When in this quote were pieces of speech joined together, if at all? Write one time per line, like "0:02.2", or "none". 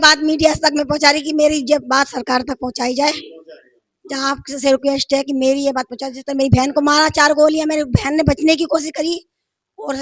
none